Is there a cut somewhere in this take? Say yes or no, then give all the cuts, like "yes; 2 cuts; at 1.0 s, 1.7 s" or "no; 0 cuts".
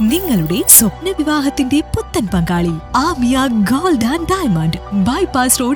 no; 0 cuts